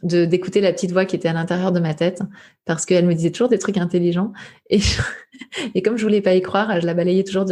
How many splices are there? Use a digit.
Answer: 0